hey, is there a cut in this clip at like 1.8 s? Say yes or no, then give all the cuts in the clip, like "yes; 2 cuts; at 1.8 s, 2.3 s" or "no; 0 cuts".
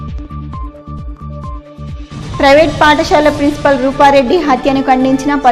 yes; 1 cut; at 1.8 s